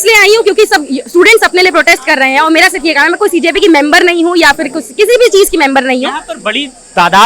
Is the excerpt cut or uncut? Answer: uncut